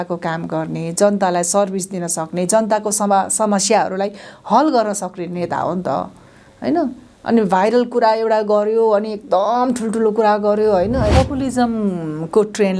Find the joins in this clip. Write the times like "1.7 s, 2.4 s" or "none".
11.1 s